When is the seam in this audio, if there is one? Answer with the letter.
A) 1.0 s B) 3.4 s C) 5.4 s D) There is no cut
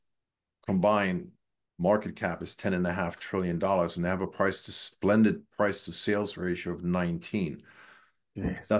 D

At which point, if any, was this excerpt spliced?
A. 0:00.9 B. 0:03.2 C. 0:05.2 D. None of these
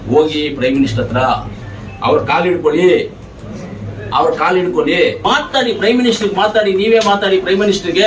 C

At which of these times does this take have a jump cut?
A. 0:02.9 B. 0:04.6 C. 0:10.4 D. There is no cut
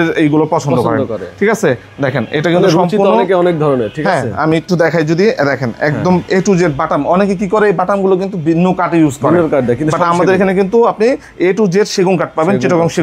D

